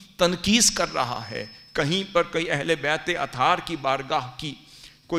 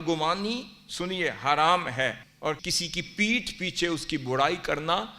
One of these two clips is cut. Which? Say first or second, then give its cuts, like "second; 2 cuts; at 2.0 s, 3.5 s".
second; 1 cut; at 2.3 s